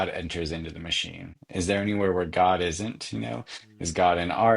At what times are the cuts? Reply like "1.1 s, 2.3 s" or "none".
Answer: 1.4 s